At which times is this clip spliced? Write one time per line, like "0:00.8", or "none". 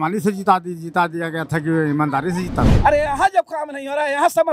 0:02.7